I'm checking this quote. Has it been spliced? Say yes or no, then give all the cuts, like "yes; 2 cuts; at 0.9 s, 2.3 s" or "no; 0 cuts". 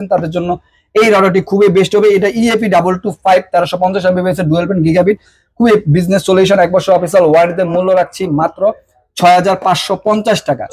no; 0 cuts